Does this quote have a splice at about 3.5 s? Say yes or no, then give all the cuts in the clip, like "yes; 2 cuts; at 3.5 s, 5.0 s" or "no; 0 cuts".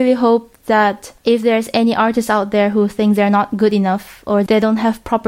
no; 1 cut; at 1.1 s